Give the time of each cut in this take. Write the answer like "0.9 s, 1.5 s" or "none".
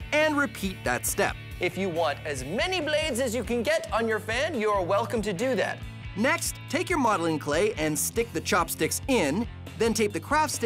none